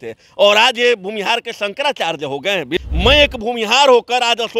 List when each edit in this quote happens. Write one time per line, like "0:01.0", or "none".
0:02.8